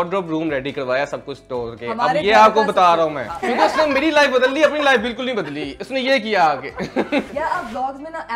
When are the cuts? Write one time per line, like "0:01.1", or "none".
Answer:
0:03.3
0:07.3